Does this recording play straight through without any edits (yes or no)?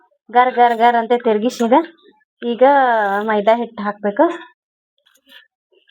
no